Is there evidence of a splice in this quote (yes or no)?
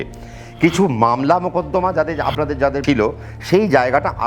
yes